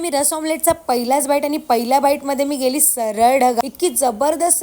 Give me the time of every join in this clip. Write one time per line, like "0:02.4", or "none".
0:03.6